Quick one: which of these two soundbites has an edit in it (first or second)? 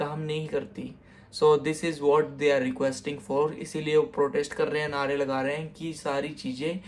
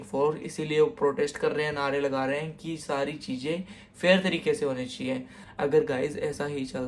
second